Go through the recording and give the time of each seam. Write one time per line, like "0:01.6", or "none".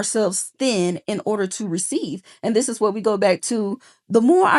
none